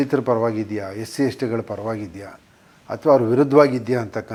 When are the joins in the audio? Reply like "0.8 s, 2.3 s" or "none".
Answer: none